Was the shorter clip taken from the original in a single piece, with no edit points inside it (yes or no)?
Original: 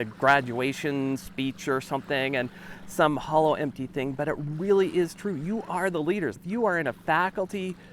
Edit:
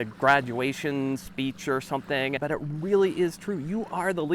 no